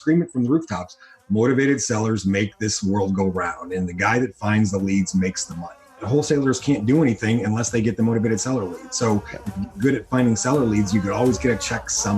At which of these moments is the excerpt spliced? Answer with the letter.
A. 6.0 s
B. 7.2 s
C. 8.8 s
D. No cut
A